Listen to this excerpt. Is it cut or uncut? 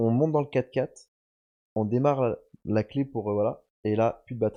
uncut